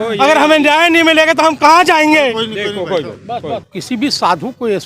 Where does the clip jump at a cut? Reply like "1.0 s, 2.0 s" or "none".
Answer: 3.7 s